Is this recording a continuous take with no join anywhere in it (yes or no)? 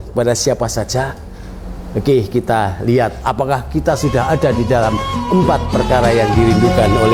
yes